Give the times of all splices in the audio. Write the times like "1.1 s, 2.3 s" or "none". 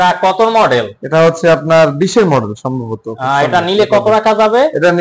none